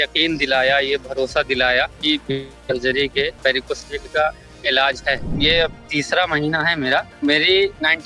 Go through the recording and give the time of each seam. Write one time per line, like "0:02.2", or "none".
0:02.0
0:03.4
0:05.3
0:07.1